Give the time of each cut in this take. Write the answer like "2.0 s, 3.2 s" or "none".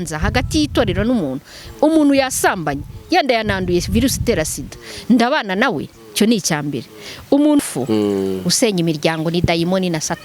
7.6 s